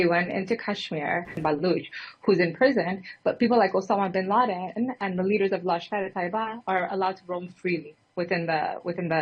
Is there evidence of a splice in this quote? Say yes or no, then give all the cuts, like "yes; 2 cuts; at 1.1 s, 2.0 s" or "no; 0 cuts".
yes; 1 cut; at 1.4 s